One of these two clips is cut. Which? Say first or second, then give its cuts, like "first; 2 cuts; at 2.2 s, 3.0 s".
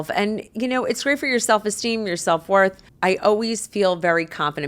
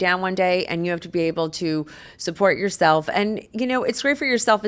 first; 1 cut; at 2.9 s